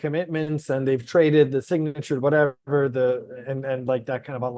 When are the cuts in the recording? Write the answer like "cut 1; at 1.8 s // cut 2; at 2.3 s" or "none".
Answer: none